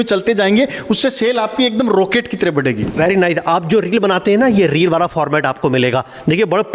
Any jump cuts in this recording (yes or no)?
no